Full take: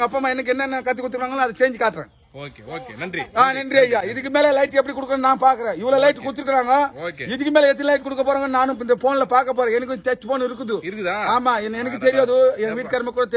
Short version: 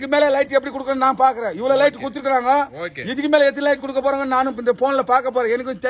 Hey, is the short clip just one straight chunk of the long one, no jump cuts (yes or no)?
yes